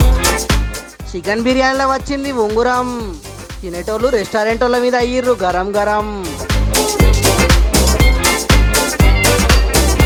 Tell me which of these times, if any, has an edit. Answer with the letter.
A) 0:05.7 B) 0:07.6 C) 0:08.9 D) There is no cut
D